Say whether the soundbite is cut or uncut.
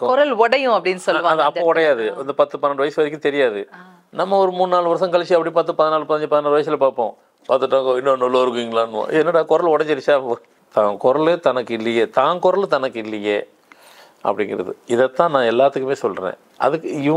cut